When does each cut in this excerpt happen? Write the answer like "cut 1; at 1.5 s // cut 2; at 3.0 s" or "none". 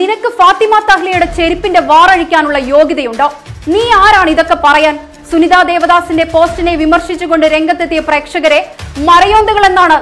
none